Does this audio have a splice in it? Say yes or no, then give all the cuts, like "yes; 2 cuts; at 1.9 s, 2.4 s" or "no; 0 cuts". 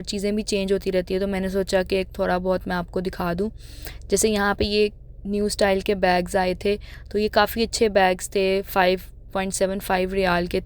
no; 0 cuts